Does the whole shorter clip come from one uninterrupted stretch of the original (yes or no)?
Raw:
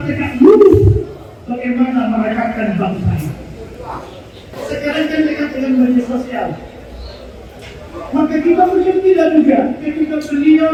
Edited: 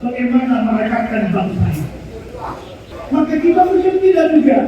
no